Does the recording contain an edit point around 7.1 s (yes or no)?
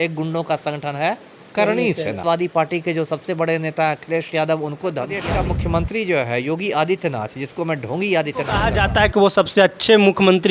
no